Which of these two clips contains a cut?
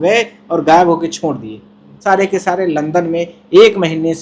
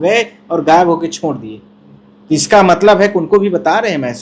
first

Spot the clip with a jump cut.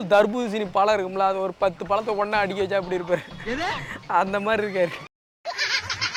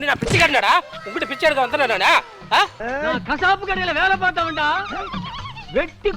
second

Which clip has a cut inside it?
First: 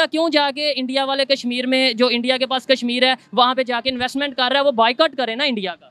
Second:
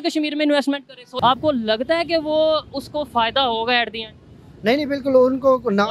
second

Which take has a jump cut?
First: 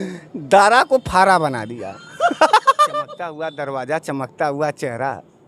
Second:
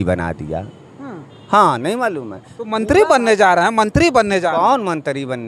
first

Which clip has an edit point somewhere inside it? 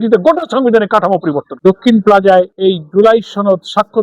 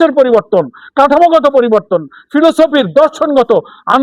first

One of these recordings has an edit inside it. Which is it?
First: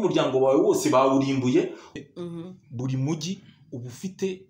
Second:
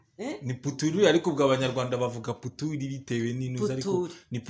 first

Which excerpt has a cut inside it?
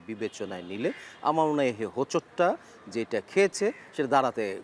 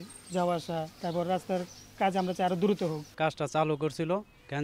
second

